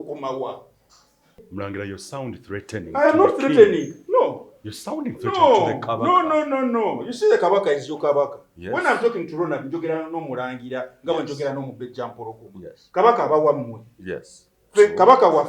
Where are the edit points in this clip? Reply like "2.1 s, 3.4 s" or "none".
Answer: 1.5 s